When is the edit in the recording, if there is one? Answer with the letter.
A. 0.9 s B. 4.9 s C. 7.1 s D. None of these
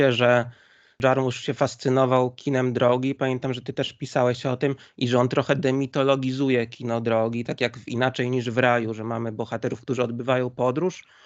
A